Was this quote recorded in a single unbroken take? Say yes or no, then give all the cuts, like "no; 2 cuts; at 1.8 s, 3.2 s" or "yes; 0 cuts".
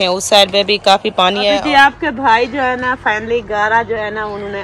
no; 1 cut; at 1.6 s